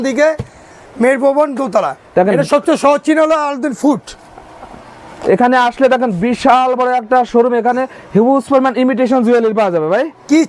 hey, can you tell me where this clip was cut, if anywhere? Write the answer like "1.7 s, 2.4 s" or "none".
none